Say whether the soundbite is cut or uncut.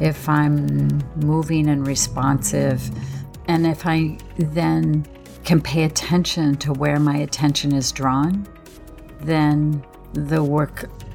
cut